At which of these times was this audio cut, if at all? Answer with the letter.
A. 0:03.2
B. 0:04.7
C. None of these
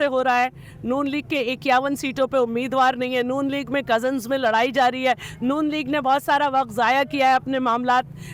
C